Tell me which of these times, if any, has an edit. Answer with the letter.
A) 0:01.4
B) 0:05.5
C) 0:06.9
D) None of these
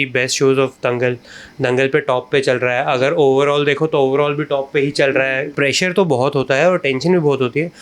B